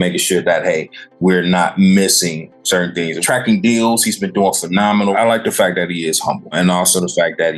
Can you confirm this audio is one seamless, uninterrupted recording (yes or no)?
no